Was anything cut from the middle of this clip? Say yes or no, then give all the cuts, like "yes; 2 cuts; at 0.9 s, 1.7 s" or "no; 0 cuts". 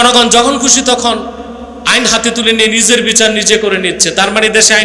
no; 0 cuts